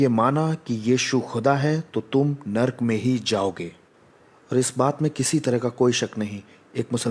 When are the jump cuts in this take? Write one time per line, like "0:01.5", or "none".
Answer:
none